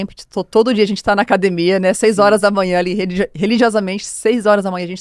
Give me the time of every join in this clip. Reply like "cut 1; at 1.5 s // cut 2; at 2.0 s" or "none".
none